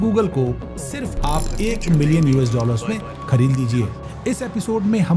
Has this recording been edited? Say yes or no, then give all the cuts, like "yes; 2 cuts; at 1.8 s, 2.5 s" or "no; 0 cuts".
yes; 1 cut; at 4.0 s